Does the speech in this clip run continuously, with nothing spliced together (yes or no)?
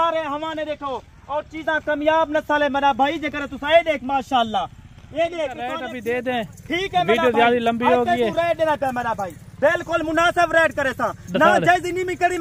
no